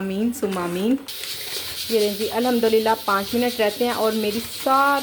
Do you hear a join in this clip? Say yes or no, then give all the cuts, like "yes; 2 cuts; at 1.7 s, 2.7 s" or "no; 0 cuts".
yes; 1 cut; at 1.0 s